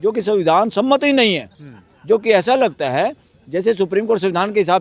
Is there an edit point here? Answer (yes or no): no